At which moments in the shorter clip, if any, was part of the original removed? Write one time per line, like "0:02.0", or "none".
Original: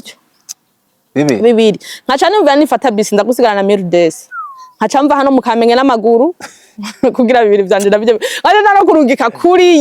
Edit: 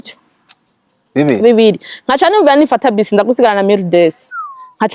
none